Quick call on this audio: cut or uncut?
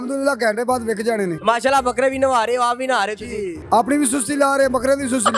cut